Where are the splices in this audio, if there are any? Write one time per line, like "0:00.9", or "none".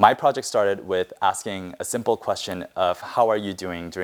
none